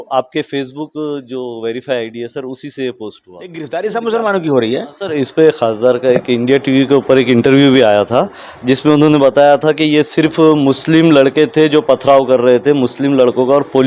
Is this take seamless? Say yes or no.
no